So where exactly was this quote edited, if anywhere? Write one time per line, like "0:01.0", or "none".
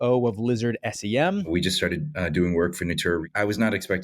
0:01.5
0:03.2